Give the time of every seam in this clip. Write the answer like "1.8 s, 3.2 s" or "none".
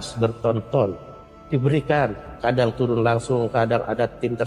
none

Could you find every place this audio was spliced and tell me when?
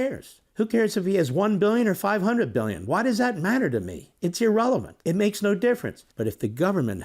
6.0 s

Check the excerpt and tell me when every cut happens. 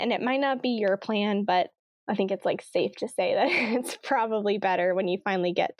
2.0 s

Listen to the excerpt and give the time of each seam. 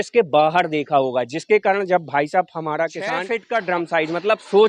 3.3 s

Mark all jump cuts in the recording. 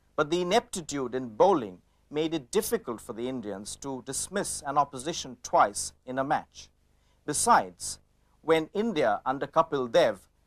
9.2 s

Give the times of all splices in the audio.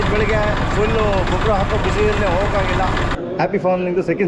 3.1 s

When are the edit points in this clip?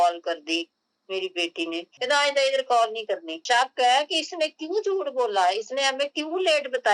1.9 s, 3.4 s

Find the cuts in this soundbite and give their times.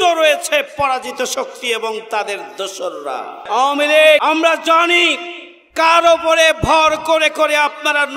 3.4 s, 4.2 s

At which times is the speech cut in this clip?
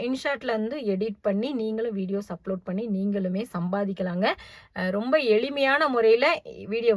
none

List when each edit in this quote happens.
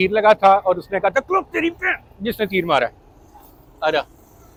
none

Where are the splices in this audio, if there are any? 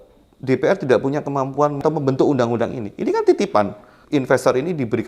1.8 s, 4.0 s

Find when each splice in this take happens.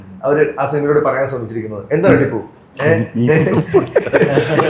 none

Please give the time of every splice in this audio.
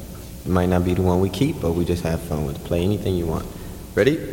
none

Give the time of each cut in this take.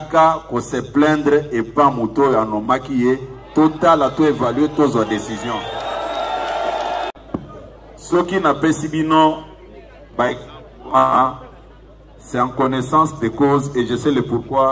7.4 s

